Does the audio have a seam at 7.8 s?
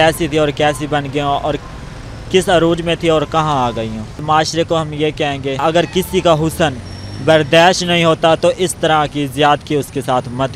no; 2 cuts; at 4.2 s, 5.6 s

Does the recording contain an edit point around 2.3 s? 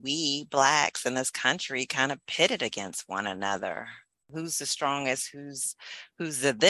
no; 1 cut; at 4.2 s

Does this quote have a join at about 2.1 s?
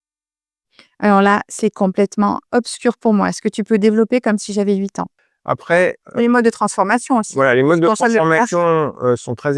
no; 1 cut; at 5.1 s

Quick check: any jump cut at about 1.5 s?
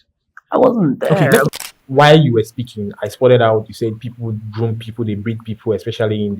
yes; 1 cut; at 1.5 s

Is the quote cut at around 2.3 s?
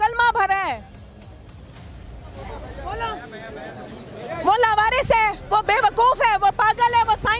yes; 1 cut; at 2.3 s

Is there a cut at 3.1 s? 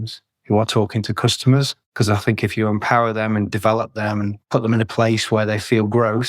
no; 2 cuts; at 1.8 s, 4.4 s

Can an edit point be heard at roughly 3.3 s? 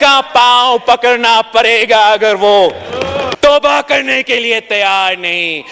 yes; 1 cut; at 3.3 s

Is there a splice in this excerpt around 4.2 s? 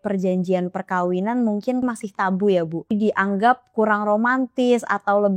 no; 2 cuts; at 1.8 s, 2.9 s

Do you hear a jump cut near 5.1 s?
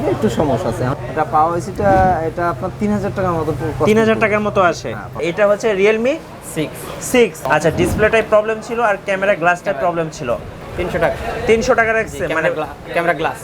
yes; 4 cuts; at 0.9 s, 5.1 s, 7.4 s, 10.5 s

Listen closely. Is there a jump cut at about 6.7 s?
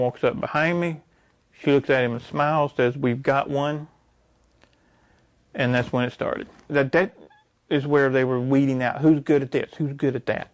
yes; 1 cut; at 6.7 s

